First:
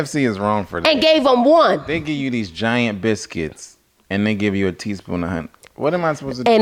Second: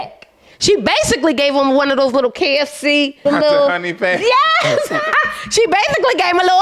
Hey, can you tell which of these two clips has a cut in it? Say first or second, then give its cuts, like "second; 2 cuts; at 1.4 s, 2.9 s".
second; 1 cut; at 3.2 s